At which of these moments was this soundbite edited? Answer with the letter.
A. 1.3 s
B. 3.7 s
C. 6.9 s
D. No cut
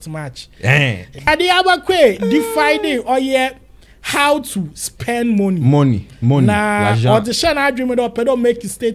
A